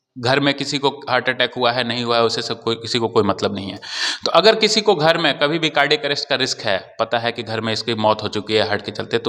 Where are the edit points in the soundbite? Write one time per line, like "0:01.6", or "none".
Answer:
none